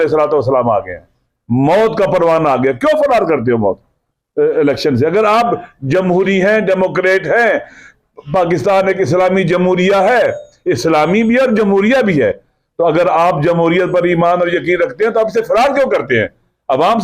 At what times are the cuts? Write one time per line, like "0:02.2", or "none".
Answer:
none